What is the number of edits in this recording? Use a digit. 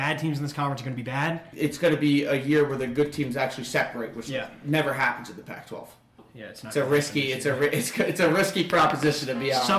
2